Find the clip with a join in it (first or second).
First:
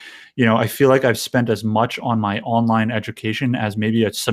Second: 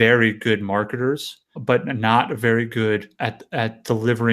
second